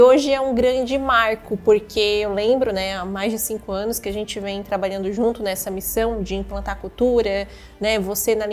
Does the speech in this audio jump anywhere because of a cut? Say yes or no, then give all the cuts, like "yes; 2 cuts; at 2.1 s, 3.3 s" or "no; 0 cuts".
no; 0 cuts